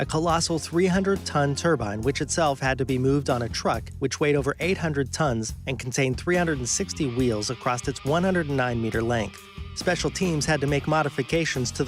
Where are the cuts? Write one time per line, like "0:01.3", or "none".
0:10.6